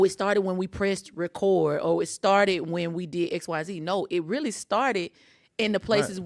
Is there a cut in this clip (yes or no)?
no